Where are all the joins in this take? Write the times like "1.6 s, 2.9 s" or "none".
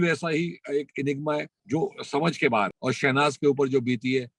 2.8 s

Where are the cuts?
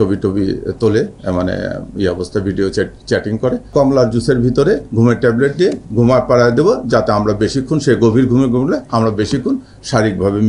3.7 s

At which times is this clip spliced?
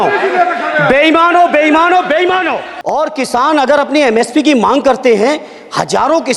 2.6 s

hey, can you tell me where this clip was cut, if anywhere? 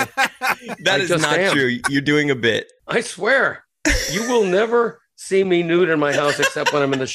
2.7 s

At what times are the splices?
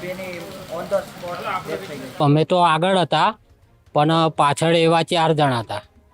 2.0 s

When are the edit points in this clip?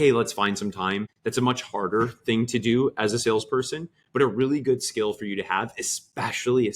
1.1 s

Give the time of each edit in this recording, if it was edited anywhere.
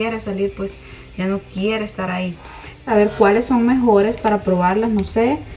2.8 s

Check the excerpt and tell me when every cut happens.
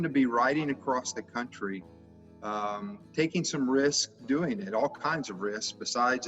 none

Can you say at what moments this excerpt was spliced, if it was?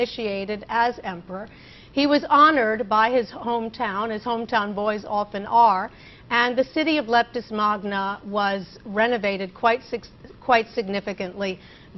4.2 s

